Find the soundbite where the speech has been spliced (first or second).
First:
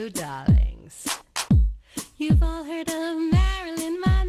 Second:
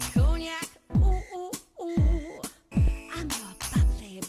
first